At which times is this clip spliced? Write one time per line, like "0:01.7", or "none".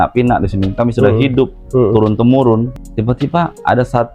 0:02.7